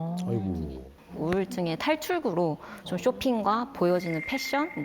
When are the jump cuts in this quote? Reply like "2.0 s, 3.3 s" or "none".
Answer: 0.9 s

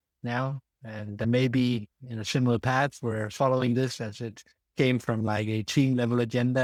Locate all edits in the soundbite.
none

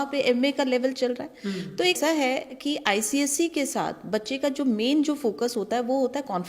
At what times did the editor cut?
2.0 s

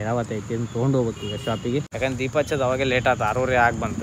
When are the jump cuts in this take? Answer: none

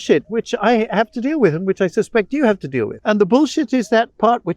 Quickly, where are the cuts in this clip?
2.9 s

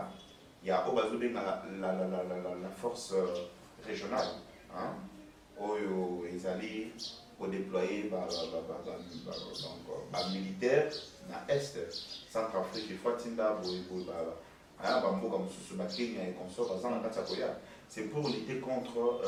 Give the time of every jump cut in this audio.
none

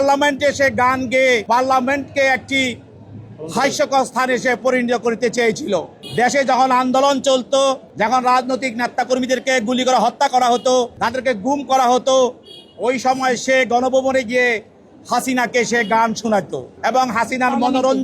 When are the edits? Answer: 1.4 s, 6.0 s, 7.9 s, 11.0 s, 16.6 s

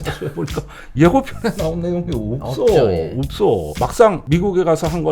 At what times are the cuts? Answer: 3.7 s

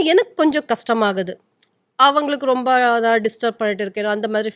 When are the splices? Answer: none

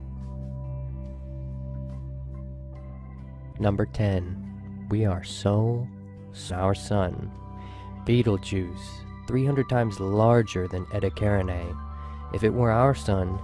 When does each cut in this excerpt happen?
none

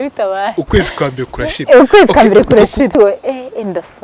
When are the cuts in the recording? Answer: 3.0 s

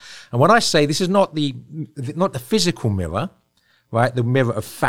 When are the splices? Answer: none

